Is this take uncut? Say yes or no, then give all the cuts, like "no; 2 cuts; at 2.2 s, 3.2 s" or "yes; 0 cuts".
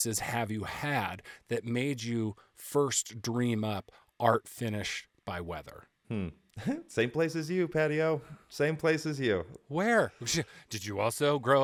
yes; 0 cuts